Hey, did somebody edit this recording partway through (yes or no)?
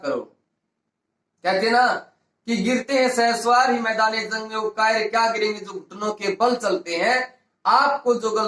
no